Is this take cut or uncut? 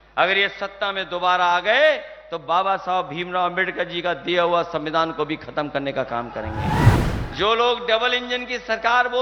cut